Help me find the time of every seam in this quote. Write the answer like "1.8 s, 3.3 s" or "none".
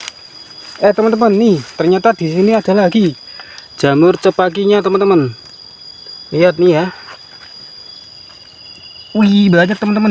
none